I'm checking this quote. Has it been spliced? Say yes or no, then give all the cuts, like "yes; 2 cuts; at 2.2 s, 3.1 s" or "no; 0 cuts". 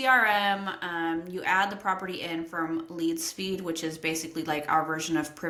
no; 0 cuts